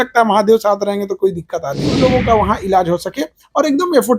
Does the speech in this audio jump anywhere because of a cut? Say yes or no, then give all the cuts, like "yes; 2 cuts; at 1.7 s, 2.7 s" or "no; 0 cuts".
yes; 1 cut; at 1.9 s